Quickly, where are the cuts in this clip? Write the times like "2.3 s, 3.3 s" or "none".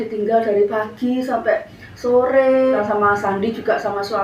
2.8 s